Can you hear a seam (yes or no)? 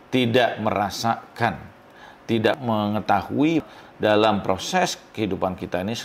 yes